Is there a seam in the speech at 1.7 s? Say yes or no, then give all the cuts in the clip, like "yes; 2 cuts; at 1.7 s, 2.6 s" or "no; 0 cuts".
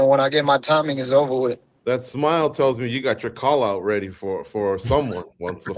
yes; 1 cut; at 1.7 s